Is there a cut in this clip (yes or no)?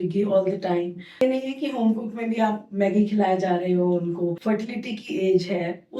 yes